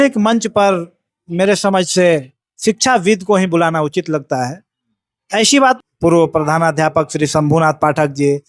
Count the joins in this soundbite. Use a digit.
1